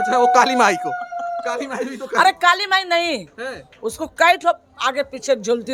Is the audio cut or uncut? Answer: uncut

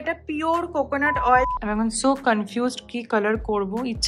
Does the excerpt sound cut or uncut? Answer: cut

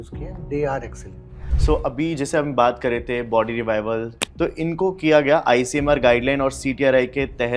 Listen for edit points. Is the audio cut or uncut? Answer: cut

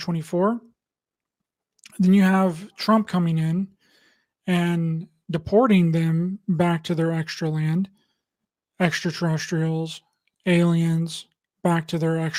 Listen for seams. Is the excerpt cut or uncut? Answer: uncut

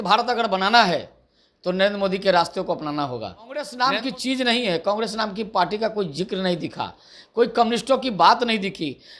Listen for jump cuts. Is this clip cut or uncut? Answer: cut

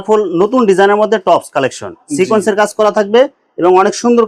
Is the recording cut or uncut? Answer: uncut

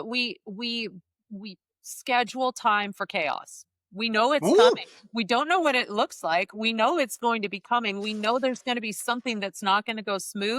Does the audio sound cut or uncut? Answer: uncut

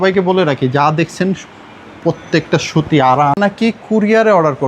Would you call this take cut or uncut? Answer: cut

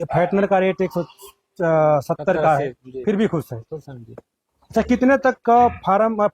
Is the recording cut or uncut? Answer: uncut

